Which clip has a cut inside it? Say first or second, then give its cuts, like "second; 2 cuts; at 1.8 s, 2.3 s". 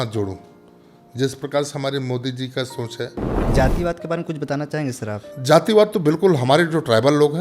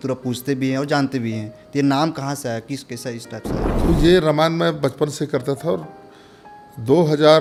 first; 1 cut; at 3.5 s